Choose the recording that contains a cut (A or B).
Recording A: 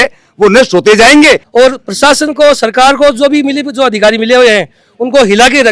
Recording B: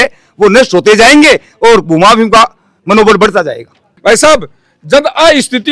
A